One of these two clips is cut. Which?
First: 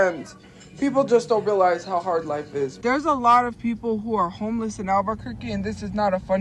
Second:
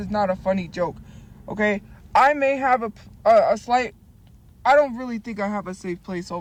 first; 1 cut; at 2.7 s

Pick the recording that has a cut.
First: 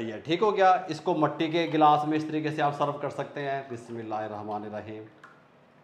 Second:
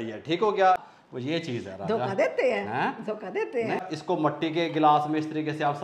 second; 2 cuts; at 0.9 s, 3.9 s

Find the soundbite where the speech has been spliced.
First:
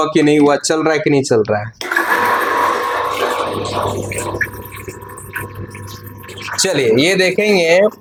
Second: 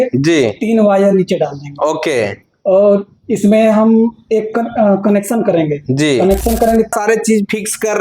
second; 1 cut; at 6.9 s

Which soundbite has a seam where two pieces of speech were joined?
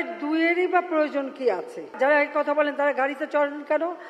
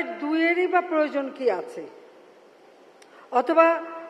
first; 1 cut; at 1.9 s

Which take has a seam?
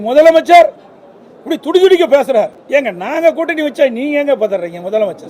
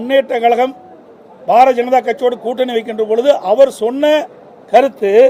first; 1 cut; at 2.6 s

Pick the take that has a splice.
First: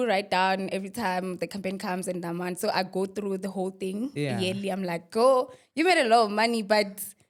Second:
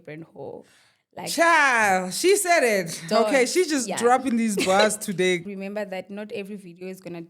second; 1 cut; at 5.4 s

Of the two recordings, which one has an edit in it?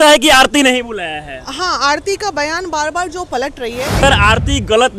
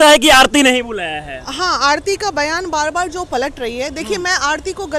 first; 1 cut; at 4.0 s

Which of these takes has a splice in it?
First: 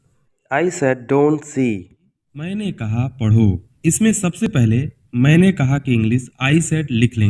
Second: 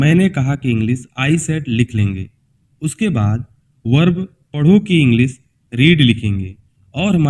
first; 1 cut; at 2.5 s

